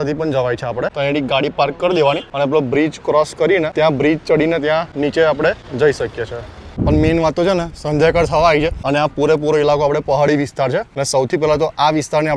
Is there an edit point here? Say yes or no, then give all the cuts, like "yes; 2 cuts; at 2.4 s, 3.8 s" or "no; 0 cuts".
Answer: yes; 8 cuts; at 0.9 s, 2.3 s, 3.7 s, 4.9 s, 5.7 s, 6.7 s, 8.8 s, 10.9 s